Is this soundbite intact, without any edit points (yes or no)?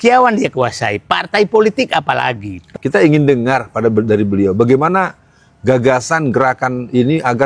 no